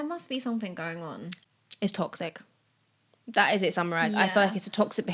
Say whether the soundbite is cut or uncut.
cut